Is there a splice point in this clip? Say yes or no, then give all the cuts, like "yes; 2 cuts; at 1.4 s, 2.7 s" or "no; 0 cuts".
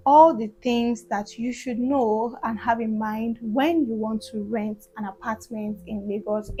no; 0 cuts